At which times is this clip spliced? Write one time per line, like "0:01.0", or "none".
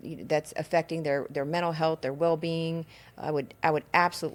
none